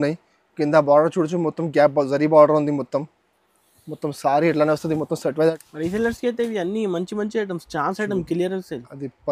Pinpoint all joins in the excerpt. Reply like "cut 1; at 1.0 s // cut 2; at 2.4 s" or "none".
cut 1; at 5.5 s